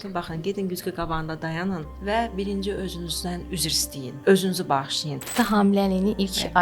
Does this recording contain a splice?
yes; 3 cuts; at 1.9 s, 3.6 s, 5.3 s

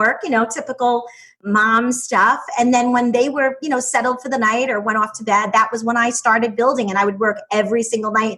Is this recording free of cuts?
no; 1 cut; at 1.4 s

